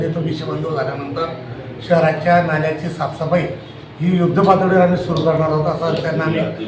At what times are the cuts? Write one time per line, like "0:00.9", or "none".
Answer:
none